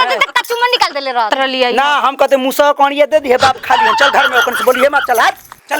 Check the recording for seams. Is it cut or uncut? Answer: cut